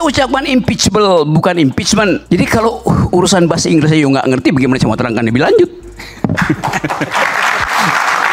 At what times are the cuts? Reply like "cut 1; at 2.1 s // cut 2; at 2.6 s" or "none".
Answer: cut 1; at 2.2 s